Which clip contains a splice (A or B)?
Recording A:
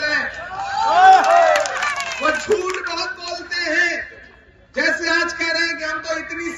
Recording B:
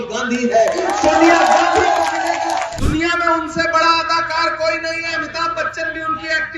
B